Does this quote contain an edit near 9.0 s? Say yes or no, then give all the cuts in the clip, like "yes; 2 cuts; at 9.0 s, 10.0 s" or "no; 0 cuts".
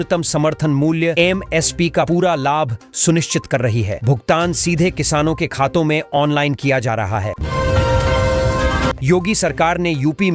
yes; 2 cuts; at 7.4 s, 9.0 s